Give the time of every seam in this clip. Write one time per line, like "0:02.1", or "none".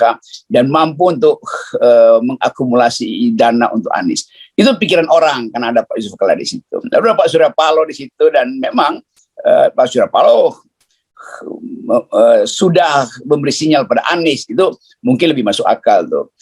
none

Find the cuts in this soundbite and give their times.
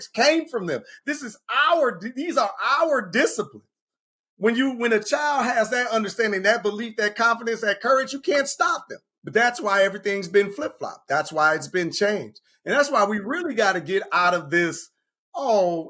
none

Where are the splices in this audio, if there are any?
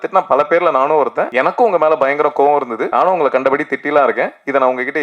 0:01.2
0:02.8

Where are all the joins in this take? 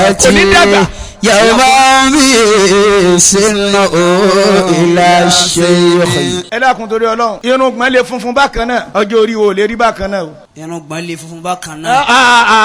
0:06.5
0:07.4
0:08.9
0:10.5

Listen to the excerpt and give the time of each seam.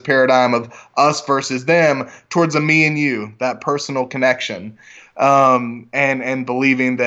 none

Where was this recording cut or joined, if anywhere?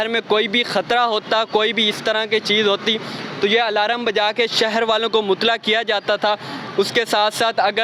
none

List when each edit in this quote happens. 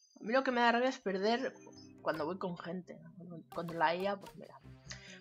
0:01.9

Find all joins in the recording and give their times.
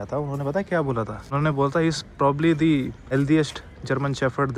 0:01.2
0:03.0

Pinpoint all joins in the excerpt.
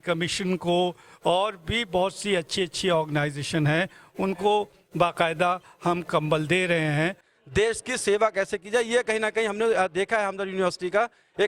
0:07.2

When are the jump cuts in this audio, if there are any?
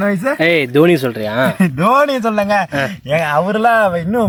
none

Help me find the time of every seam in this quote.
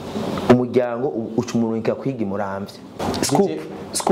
0:03.0

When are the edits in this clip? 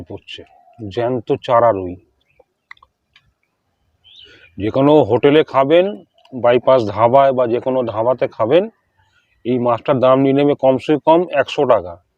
0:04.2

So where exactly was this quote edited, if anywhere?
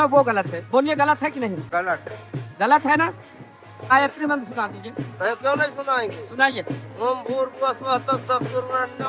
0:01.6
0:03.7

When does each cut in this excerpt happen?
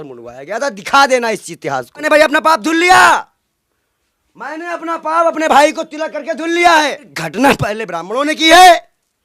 0:02.0
0:07.1

